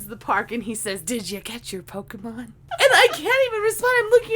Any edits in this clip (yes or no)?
yes